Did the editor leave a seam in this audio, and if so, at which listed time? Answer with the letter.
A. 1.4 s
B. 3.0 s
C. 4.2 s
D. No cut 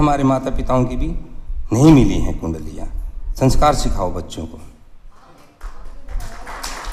D